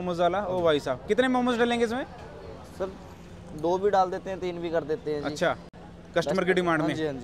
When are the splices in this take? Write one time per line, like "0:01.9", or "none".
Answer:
none